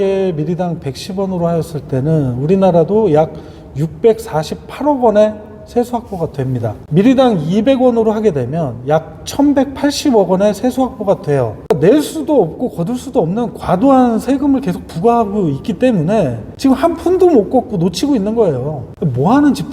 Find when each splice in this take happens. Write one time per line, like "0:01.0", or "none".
0:06.8
0:11.6